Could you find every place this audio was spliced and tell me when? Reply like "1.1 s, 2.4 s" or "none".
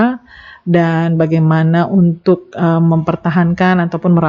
none